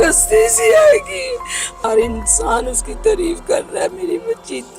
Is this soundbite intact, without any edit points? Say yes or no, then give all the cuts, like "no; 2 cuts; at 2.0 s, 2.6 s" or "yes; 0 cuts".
no; 1 cut; at 1.8 s